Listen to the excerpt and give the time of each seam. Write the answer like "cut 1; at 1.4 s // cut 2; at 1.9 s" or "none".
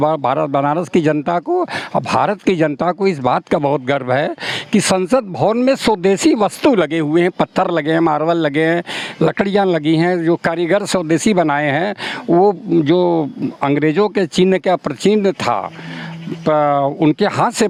none